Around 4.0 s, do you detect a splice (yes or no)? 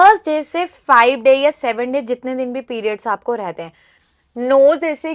yes